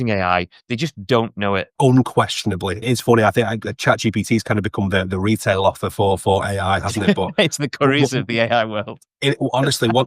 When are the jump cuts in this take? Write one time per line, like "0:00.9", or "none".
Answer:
0:01.7
0:02.8

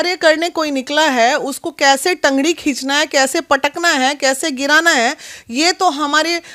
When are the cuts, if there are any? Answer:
none

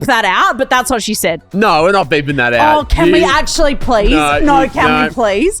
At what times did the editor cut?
0:01.4

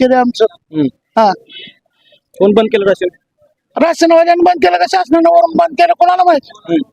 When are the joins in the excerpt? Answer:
none

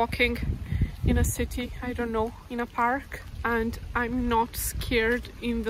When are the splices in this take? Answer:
0:02.4
0:03.2

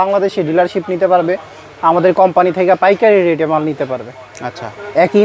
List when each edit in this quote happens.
none

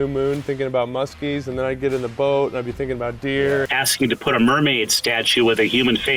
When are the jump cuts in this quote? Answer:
0:03.7

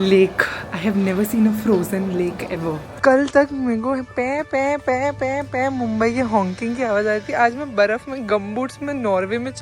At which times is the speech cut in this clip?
0:02.9

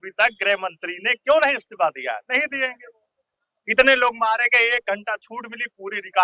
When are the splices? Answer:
none

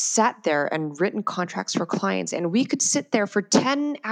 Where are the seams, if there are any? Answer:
none

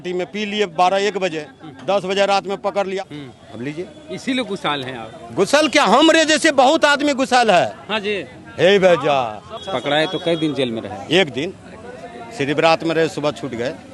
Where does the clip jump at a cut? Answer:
0:02.9
0:09.5

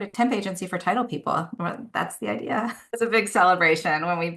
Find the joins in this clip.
0:02.7

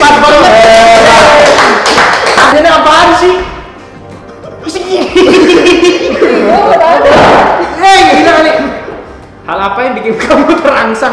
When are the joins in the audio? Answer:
0:02.5

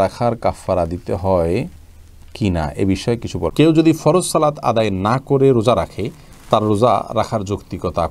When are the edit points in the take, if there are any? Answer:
0:03.5

